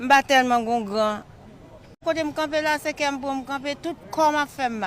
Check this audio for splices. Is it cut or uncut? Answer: cut